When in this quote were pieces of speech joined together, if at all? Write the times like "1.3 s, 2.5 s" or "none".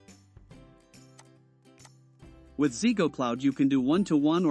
2.5 s